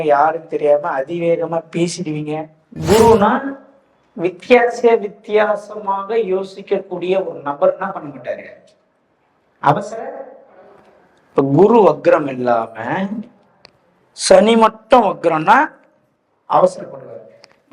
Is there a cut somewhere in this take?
yes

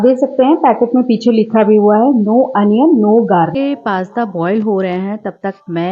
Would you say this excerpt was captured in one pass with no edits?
no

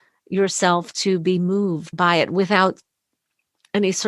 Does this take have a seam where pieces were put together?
yes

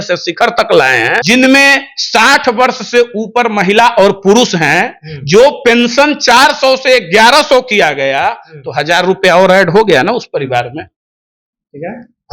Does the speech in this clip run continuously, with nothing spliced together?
no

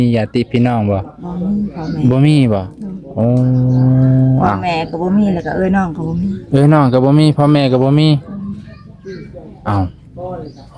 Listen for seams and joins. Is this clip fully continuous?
yes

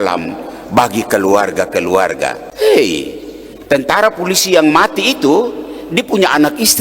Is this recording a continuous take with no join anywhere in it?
no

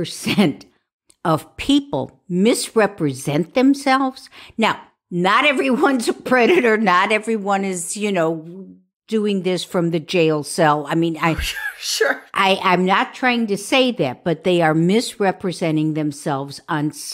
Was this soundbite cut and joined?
no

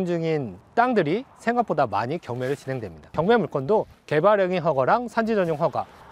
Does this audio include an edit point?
yes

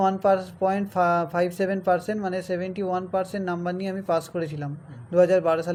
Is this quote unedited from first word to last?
yes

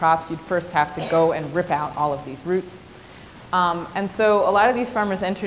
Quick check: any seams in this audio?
no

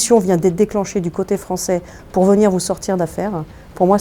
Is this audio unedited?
yes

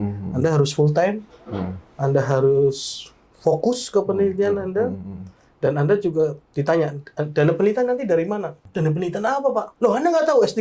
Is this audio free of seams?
no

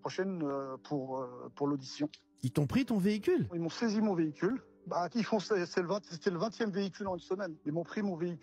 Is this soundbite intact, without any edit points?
yes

